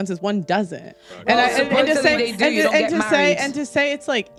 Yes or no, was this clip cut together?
no